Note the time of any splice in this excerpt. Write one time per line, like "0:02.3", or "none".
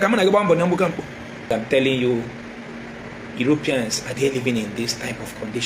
0:01.5